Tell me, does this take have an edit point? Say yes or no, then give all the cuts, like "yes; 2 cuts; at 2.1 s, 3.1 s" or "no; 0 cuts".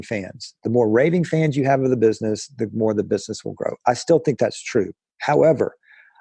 no; 0 cuts